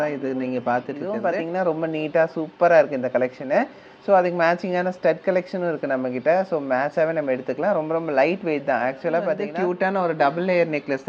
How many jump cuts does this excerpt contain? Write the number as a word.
two